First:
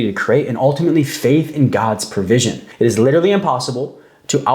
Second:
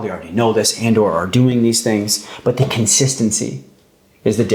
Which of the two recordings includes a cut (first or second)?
first